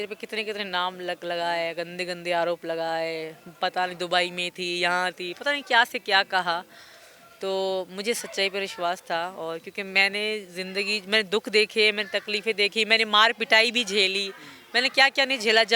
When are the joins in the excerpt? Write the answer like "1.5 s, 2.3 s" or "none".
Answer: none